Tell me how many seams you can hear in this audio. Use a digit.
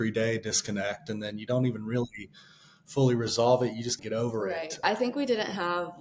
1